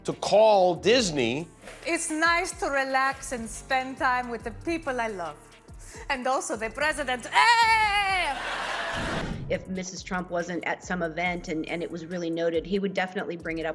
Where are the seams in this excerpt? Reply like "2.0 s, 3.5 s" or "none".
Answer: 1.7 s, 9.2 s